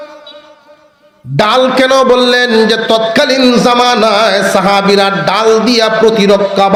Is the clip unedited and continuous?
yes; 0 cuts

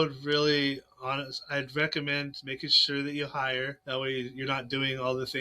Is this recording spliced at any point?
yes; 1 cut; at 3.8 s

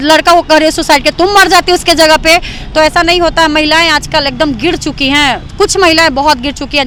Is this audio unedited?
yes; 0 cuts

